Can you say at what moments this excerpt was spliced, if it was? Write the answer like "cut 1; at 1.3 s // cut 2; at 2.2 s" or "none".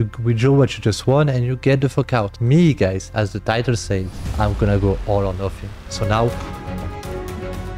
cut 1; at 6.3 s